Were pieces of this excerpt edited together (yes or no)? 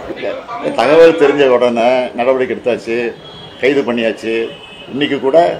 no